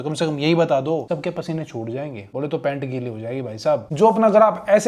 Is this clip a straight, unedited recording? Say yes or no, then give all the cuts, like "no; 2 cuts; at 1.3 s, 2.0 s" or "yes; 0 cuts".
no; 3 cuts; at 1.0 s, 2.2 s, 3.8 s